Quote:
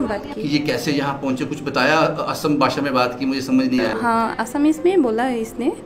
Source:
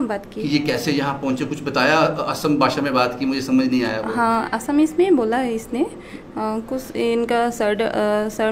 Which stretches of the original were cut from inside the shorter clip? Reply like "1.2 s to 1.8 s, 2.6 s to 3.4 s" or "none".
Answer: 3.9 s to 4.0 s